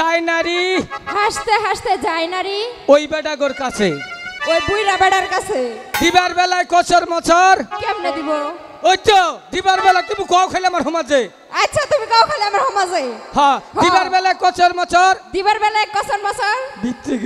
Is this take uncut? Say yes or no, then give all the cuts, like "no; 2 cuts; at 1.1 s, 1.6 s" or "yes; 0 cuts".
yes; 0 cuts